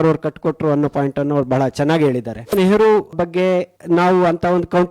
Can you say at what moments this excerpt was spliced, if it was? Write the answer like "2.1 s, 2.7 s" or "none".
2.5 s